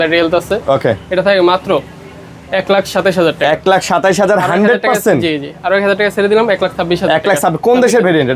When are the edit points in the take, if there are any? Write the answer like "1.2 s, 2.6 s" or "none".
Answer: none